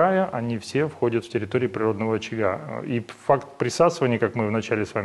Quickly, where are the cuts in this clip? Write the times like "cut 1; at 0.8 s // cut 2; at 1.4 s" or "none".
none